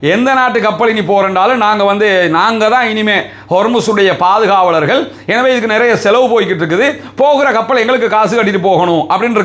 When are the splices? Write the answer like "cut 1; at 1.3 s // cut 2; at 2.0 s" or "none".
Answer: none